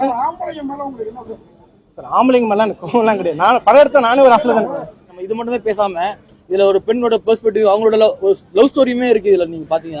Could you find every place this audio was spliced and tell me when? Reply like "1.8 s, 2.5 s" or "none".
5.2 s